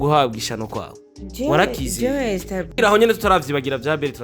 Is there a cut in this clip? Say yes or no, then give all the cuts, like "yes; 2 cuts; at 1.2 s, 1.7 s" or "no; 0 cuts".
yes; 1 cut; at 2.6 s